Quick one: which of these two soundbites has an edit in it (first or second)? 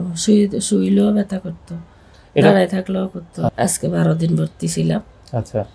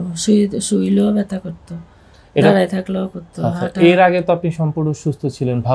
first